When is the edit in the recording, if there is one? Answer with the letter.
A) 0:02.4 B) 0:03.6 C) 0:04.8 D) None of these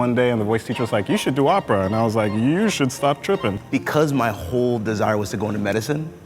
B